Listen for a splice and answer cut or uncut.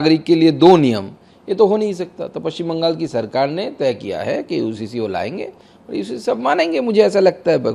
uncut